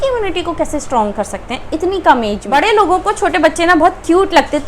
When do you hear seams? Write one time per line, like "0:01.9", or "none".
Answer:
0:02.4